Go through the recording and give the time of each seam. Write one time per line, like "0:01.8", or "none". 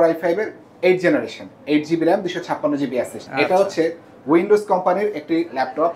0:03.2